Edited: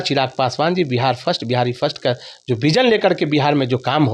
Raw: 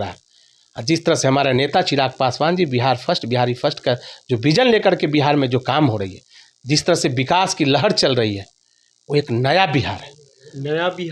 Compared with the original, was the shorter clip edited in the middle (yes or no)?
no